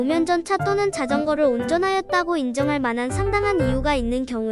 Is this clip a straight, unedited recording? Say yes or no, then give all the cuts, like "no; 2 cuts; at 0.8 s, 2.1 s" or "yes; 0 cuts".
yes; 0 cuts